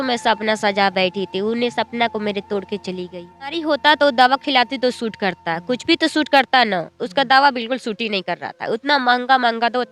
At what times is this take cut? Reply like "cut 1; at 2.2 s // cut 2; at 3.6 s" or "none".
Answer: cut 1; at 3.6 s